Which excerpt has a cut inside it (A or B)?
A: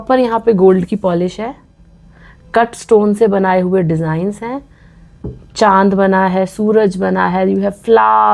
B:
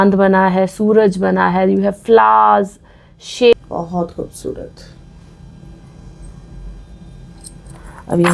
B